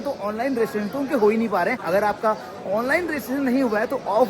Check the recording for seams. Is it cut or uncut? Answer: cut